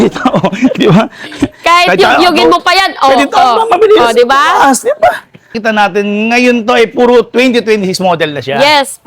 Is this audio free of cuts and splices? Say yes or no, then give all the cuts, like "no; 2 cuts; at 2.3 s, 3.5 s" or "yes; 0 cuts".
no; 1 cut; at 5.6 s